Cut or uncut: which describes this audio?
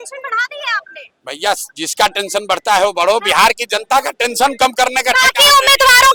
uncut